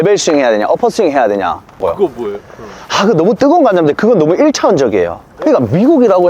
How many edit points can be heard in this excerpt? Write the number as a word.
two